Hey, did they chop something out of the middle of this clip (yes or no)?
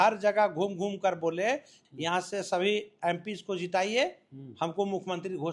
yes